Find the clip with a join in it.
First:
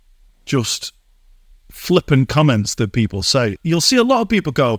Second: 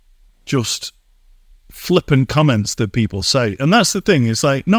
first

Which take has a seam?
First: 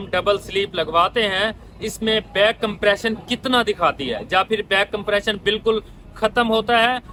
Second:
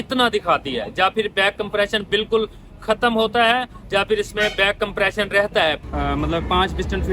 second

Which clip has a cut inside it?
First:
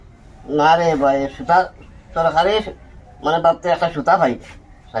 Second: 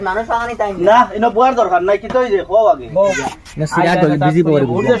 second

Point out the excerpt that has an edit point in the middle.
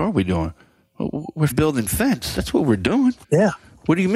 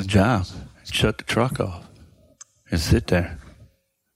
first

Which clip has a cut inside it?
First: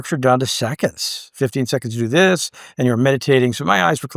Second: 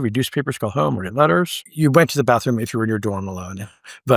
second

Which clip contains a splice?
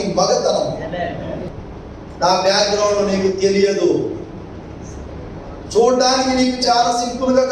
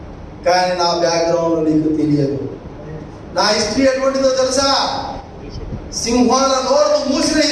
first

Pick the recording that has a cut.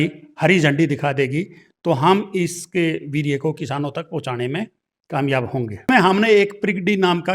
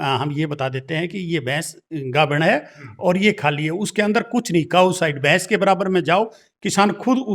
first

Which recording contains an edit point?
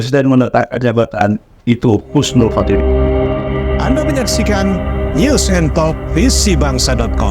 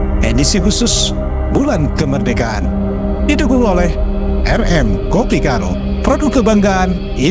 first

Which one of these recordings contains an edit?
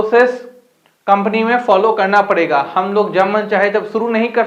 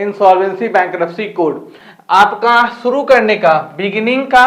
second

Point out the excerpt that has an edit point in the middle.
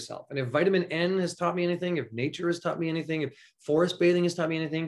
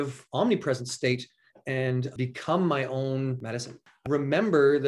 second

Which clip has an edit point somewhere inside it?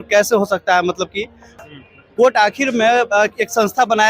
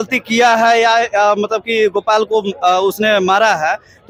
first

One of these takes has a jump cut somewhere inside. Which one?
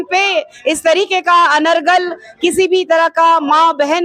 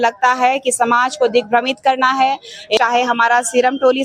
second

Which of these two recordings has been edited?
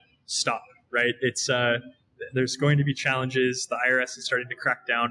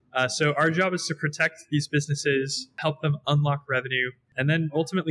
second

